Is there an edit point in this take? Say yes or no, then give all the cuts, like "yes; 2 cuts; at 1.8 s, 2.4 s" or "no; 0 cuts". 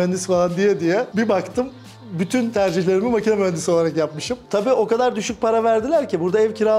yes; 1 cut; at 4.3 s